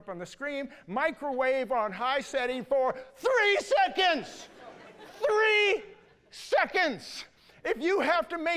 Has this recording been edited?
no; 0 cuts

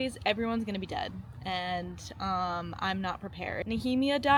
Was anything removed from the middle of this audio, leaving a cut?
no; 0 cuts

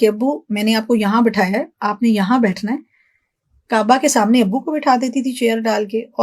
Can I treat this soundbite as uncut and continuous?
yes; 0 cuts

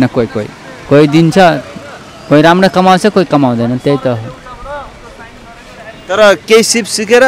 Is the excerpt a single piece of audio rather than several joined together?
yes; 0 cuts

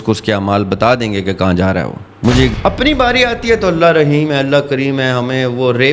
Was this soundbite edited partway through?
yes; 1 cut; at 2.5 s

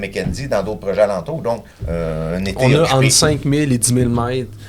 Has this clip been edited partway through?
yes; 1 cut; at 1.7 s

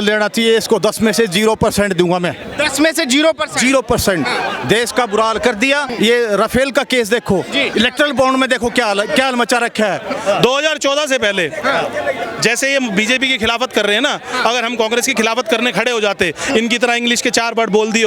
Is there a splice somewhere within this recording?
yes; 3 cuts; at 5.8 s, 7.7 s, 10.2 s

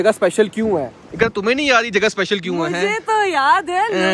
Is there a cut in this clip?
no; 0 cuts

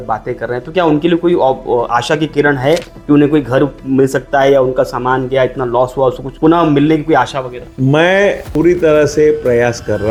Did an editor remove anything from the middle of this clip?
no; 0 cuts

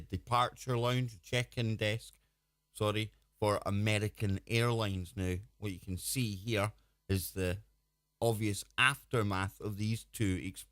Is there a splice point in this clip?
yes; 1 cut; at 1.7 s

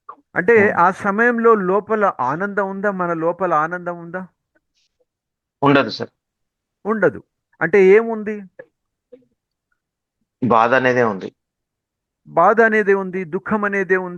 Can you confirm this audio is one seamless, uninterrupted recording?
yes; 0 cuts

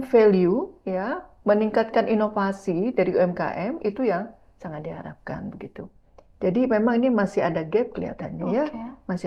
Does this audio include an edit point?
no; 0 cuts

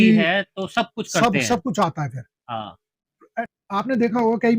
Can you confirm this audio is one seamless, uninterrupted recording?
no; 1 cut; at 3.4 s

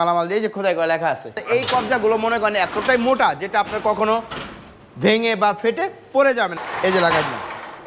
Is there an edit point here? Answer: yes; 2 cuts; at 1.4 s, 6.6 s

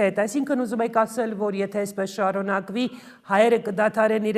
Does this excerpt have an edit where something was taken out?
no; 0 cuts

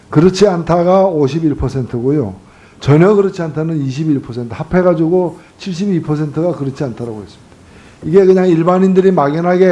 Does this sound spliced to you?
no; 0 cuts

